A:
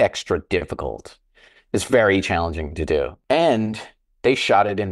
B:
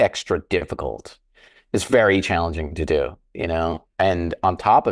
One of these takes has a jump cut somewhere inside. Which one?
A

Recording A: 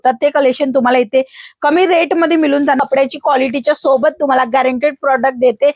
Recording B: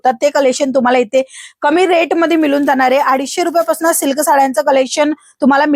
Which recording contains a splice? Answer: A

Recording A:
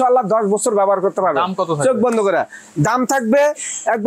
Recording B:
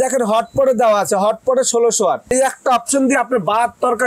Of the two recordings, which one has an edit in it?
B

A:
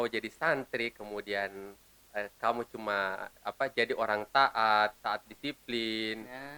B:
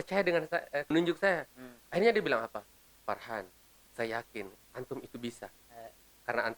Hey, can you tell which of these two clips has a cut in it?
B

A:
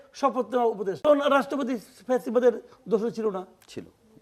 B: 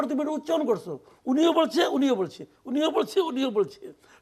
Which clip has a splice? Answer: A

